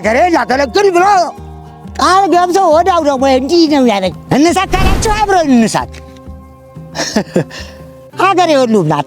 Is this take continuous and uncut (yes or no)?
no